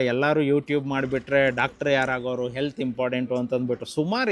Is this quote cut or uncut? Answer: uncut